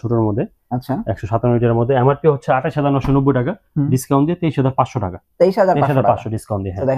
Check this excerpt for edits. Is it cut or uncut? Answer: uncut